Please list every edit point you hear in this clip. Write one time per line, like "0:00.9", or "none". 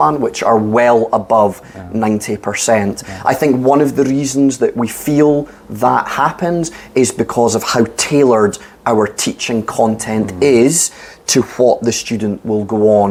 none